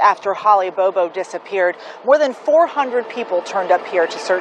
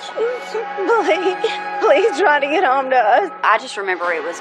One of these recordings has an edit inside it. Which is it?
second; 1 cut; at 3.5 s

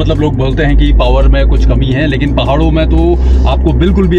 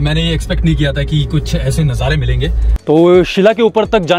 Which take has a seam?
second; 1 cut; at 2.7 s

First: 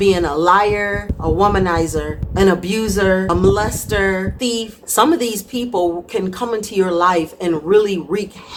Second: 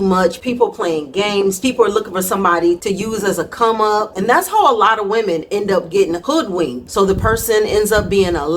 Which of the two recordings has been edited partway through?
second; 2 cuts; at 4.1 s, 6.6 s

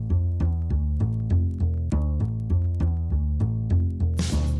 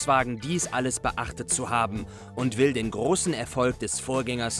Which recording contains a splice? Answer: second; 1 cut; at 2.5 s

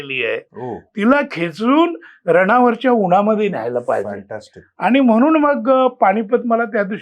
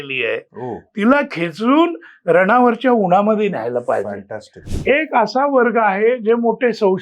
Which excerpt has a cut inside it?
second; 1 cut; at 4.7 s

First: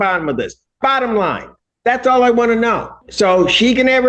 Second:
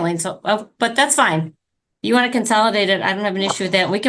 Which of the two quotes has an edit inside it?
first; 1 cut; at 3.0 s

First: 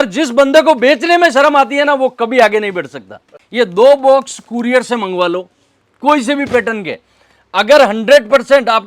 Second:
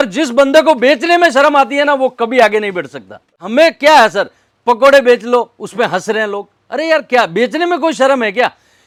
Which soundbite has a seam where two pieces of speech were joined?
first; 1 cut; at 3.4 s

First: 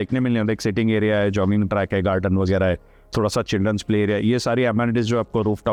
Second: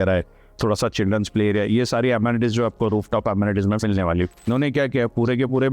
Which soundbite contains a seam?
second; 1 cut; at 4.5 s

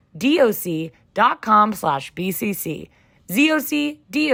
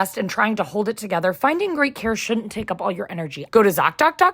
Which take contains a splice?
second; 1 cut; at 3.4 s

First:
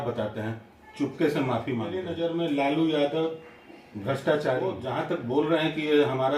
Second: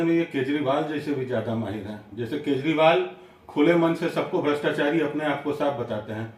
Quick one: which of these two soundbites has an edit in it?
first; 2 cuts; at 2.1 s, 4.8 s

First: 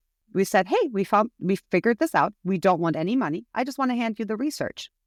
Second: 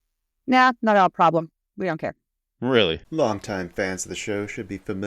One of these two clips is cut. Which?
second; 1 cut; at 3.0 s

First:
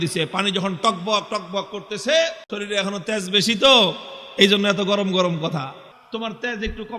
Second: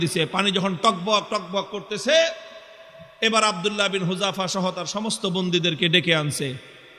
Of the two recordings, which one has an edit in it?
first; 2 cuts; at 2.5 s, 5.9 s

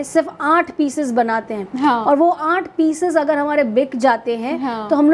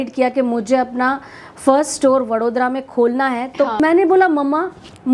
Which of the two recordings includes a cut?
second; 1 cut; at 3.8 s

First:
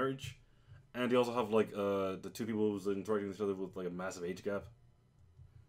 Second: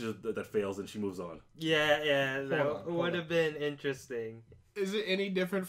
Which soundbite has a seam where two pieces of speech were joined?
first; 1 cut; at 1.1 s

